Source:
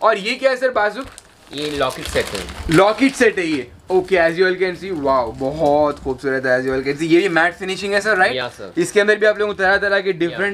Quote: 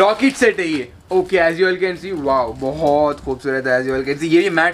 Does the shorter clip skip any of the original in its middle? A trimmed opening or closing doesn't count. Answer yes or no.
no